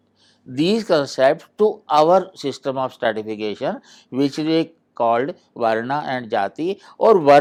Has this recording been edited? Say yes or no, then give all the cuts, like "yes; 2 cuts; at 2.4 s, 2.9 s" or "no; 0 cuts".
no; 0 cuts